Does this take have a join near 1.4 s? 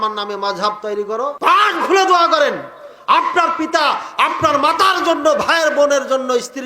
yes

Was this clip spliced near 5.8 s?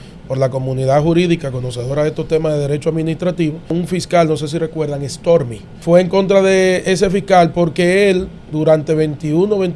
yes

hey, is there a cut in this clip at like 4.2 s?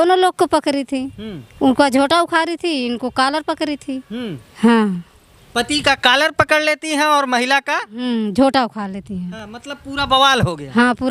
no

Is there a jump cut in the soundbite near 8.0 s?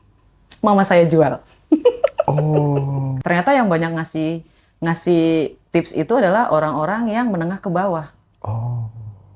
no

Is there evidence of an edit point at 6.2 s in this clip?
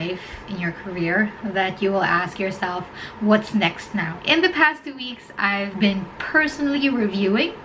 no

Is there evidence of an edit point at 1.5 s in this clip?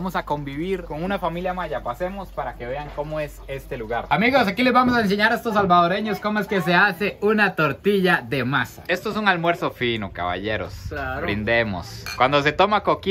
no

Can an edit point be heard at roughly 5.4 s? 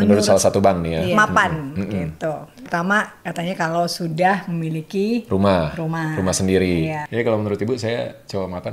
no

